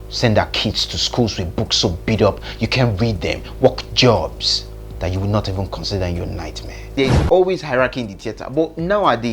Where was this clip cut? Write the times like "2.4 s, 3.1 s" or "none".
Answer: 6.9 s